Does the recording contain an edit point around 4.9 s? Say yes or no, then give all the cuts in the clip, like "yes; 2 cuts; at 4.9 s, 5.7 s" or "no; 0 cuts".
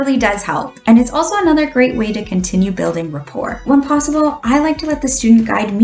no; 1 cut; at 3.6 s